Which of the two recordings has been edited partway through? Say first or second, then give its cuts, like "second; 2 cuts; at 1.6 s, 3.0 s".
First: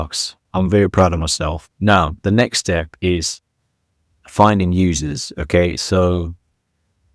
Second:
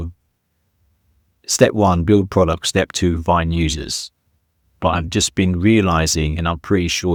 first; 1 cut; at 5.3 s